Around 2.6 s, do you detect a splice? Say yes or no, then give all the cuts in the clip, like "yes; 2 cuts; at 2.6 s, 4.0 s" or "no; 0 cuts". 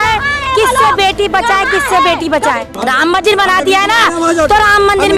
yes; 1 cut; at 2.6 s